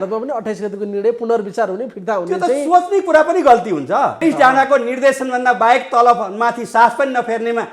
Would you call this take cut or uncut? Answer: cut